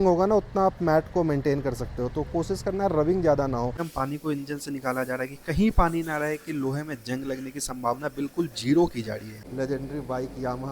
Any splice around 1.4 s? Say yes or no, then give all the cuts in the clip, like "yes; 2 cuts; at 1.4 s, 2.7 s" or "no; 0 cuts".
no; 2 cuts; at 3.8 s, 9.4 s